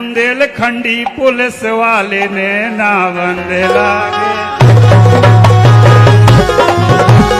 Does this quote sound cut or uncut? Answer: uncut